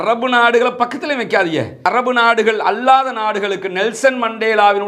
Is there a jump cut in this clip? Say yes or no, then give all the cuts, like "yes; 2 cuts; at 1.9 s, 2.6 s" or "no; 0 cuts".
no; 0 cuts